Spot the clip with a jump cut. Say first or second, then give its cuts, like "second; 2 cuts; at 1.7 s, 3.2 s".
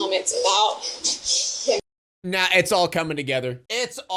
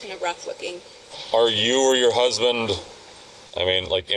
second; 1 cut; at 1.2 s